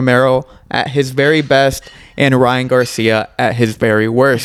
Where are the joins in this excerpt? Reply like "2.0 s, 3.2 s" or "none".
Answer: none